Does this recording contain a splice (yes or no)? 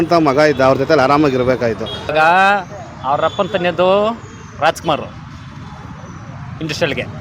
yes